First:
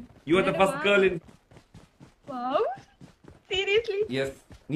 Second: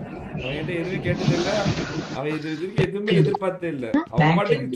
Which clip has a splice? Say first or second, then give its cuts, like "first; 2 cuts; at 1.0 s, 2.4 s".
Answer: first; 1 cut; at 1.2 s